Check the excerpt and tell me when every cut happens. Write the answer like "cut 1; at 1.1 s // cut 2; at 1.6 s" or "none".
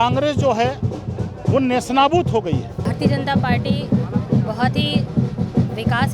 cut 1; at 2.8 s

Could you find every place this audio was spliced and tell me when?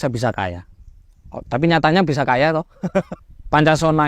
cut 1; at 3.1 s

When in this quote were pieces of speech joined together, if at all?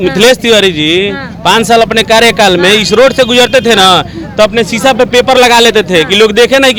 none

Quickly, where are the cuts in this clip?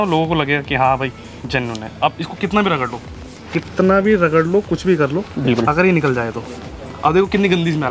none

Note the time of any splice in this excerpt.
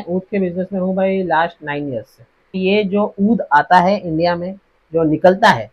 cut 1; at 2.6 s

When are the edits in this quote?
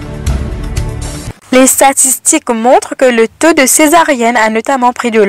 cut 1; at 1.4 s

